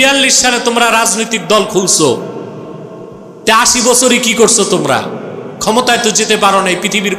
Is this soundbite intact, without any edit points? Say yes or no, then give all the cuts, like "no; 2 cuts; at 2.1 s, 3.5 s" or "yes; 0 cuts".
yes; 0 cuts